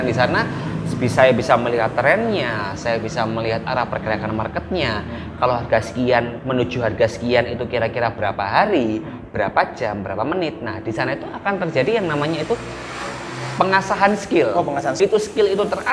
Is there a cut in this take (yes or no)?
yes